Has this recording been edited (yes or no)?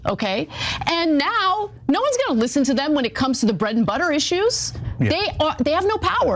no